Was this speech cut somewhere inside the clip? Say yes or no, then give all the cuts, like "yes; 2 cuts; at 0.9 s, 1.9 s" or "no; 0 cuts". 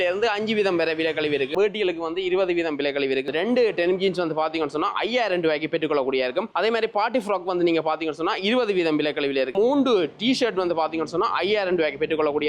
yes; 3 cuts; at 1.5 s, 3.3 s, 9.5 s